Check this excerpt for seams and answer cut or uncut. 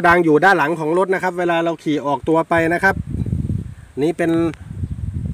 uncut